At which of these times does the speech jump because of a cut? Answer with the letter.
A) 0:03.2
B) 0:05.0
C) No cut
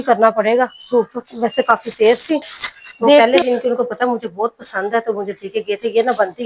A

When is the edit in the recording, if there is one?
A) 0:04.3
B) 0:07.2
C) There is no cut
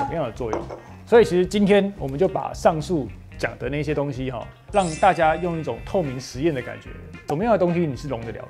B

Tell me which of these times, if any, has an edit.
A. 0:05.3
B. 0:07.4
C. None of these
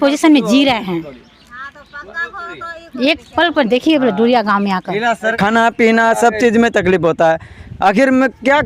A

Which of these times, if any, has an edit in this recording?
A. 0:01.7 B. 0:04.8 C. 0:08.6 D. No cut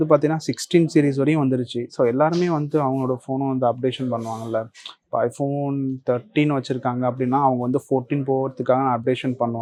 D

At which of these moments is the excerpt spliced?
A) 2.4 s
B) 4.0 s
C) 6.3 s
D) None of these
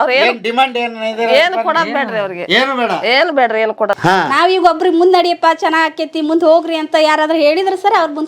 B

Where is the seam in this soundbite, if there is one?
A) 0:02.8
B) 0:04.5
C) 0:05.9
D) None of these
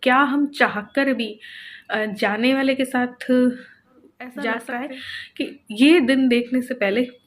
B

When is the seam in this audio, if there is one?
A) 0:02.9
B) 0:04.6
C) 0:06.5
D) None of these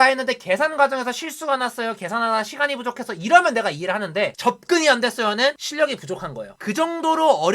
C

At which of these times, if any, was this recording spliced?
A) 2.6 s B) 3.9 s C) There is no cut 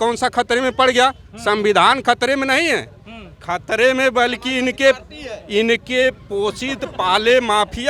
C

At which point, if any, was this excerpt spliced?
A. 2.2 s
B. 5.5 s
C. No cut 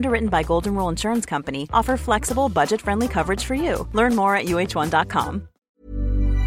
B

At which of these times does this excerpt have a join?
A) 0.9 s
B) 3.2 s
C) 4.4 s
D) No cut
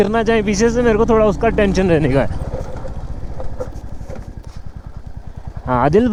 D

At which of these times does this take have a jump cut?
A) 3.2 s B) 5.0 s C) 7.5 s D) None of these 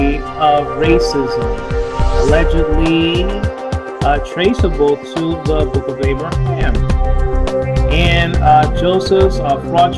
C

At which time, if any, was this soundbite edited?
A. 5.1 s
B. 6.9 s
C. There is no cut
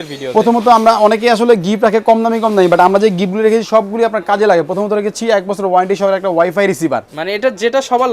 C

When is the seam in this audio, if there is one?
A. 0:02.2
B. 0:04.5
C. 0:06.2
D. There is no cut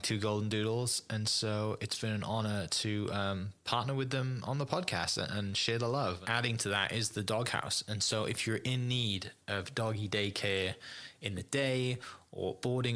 C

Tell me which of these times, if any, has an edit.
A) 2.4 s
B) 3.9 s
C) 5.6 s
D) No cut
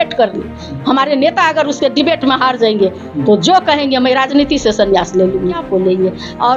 C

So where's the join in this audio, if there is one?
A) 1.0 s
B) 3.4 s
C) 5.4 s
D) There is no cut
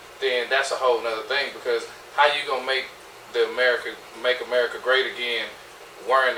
D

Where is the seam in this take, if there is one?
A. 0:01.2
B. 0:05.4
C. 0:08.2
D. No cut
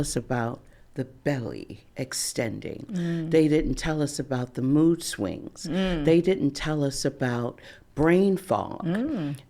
D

